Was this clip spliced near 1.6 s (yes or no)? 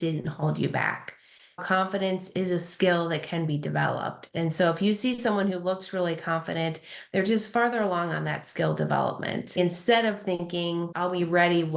yes